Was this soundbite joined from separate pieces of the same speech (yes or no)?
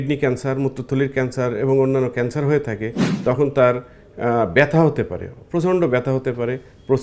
yes